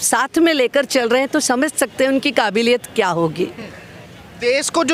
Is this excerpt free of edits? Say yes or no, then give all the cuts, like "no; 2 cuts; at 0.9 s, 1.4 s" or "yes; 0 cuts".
yes; 0 cuts